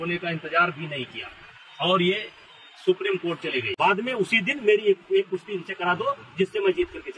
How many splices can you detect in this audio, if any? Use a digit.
1